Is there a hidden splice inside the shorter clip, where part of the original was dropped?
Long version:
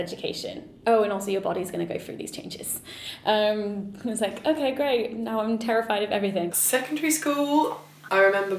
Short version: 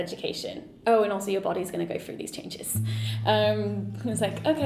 no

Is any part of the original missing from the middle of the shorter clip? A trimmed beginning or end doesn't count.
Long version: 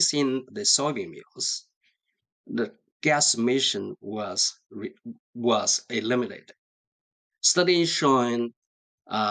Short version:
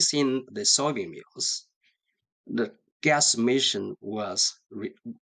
no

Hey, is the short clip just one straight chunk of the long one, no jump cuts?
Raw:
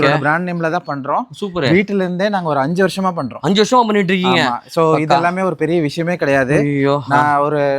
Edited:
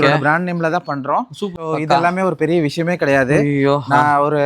no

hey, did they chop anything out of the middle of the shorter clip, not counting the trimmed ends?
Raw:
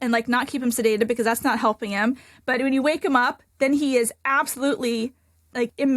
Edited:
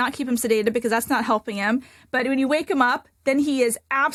no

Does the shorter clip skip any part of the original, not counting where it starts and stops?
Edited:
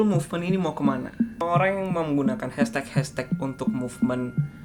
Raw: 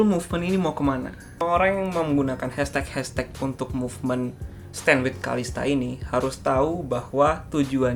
no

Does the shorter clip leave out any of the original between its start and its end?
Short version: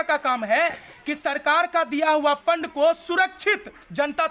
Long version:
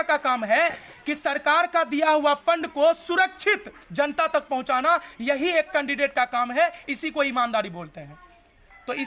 no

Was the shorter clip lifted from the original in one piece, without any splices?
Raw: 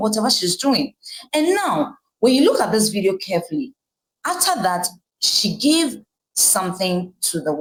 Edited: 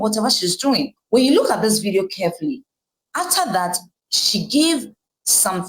no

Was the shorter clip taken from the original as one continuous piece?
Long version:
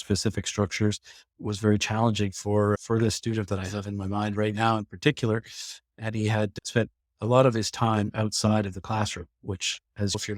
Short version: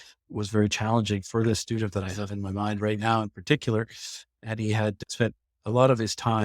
no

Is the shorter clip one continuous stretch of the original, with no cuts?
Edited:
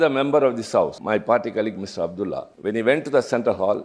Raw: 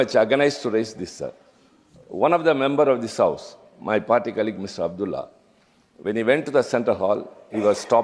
no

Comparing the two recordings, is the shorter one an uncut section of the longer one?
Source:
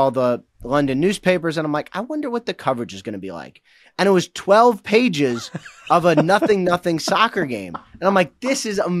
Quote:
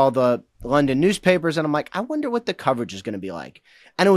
yes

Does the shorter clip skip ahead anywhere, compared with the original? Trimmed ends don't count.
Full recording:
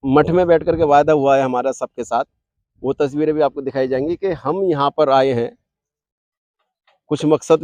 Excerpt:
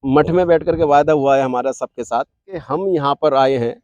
yes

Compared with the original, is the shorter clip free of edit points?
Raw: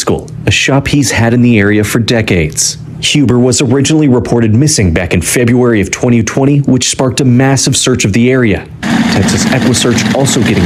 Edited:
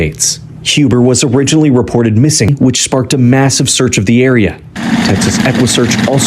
no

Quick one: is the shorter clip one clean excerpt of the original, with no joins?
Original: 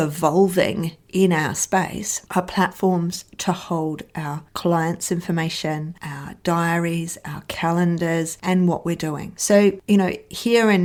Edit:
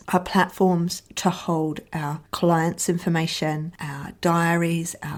yes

